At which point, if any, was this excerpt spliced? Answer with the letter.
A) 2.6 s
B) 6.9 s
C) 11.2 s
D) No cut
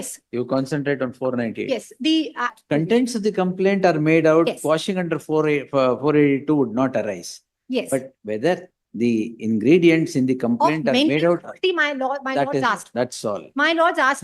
A